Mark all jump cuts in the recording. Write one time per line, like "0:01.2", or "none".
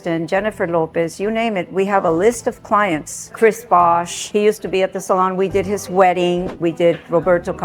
0:03.3
0:06.5